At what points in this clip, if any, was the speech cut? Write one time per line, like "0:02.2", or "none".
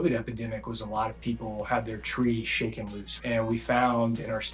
0:03.2